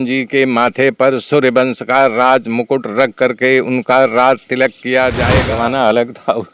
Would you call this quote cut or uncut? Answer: cut